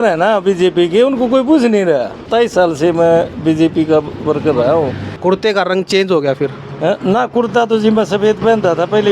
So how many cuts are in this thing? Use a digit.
2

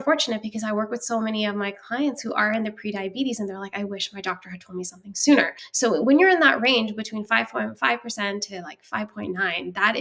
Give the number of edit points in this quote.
1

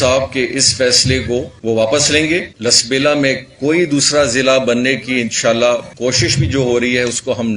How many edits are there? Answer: 3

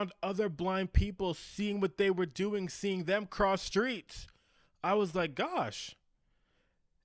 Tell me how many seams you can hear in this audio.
0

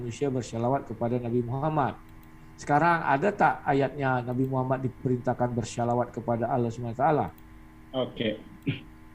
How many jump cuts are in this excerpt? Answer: 0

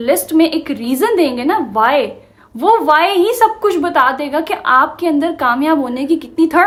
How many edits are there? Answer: 0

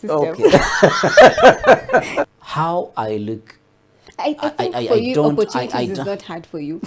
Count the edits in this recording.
0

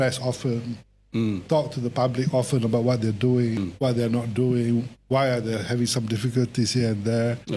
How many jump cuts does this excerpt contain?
1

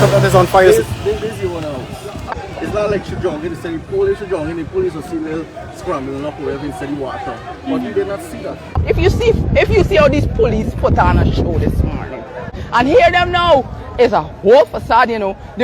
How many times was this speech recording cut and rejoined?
3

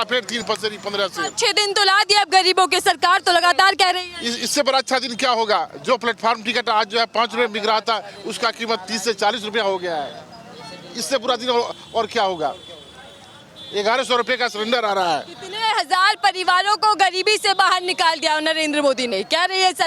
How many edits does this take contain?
0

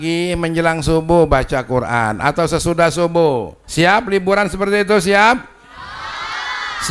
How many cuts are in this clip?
1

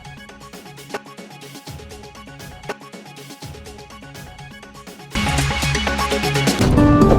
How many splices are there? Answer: 0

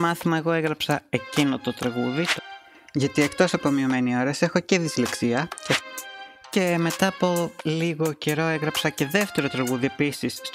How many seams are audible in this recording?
2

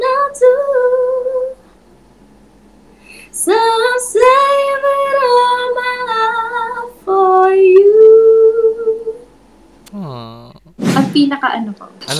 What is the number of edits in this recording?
1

